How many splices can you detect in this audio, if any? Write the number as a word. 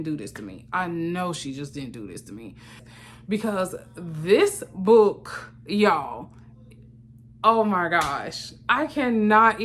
one